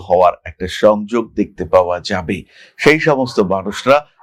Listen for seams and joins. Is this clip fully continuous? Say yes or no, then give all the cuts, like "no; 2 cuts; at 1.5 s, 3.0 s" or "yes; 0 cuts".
yes; 0 cuts